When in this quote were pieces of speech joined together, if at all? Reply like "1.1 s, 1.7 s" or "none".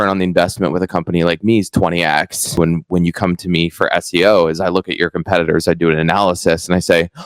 2.6 s